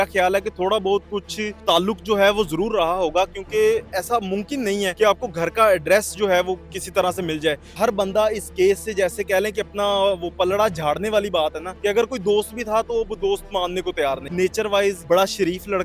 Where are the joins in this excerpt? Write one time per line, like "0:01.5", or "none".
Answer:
0:01.6
0:04.9
0:06.7
0:07.7
0:11.7
0:14.3
0:15.0